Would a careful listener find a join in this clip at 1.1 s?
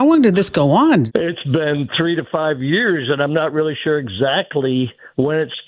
yes; 1 cut; at 1.1 s

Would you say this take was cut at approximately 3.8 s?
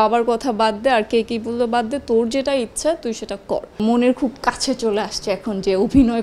yes; 1 cut; at 3.8 s

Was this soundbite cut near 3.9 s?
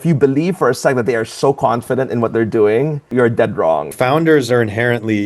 yes; 2 cuts; at 3.0 s, 3.9 s

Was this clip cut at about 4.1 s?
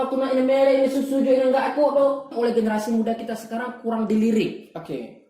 no; 1 cut; at 2.3 s

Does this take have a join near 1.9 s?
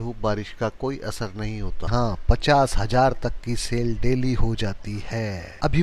yes; 1 cut; at 1.9 s

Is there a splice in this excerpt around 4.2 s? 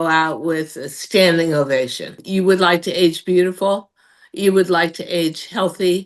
no; 1 cut; at 2.2 s

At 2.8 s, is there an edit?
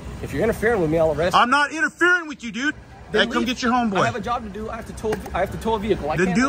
yes; 1 cut; at 2.8 s

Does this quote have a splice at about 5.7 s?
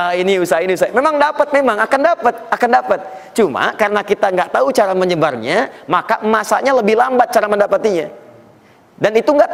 no; 0 cuts

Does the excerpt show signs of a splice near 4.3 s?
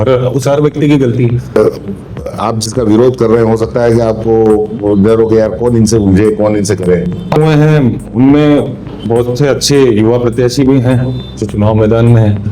no; 2 cuts; at 1.5 s, 7.4 s

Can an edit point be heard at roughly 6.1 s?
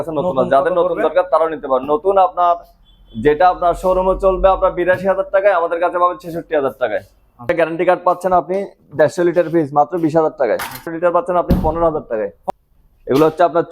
no; 3 cuts; at 7.5 s, 10.9 s, 12.4 s

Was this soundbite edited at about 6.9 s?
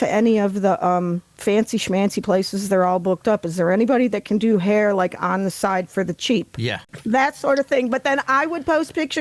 yes; 1 cut; at 6.9 s

